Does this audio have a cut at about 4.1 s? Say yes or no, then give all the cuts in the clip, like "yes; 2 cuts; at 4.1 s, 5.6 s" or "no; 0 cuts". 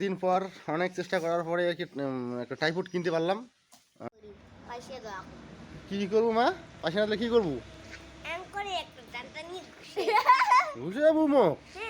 yes; 1 cut; at 4.1 s